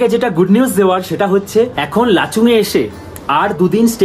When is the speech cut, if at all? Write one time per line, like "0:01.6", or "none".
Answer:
none